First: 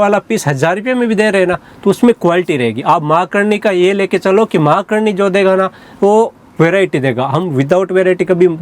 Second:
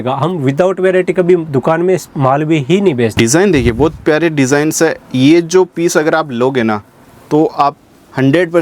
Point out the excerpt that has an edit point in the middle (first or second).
second